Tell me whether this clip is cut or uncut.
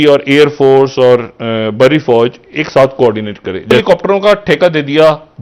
cut